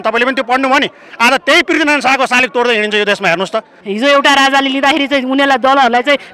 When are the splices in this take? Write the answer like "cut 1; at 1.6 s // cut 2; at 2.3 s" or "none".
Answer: cut 1; at 3.8 s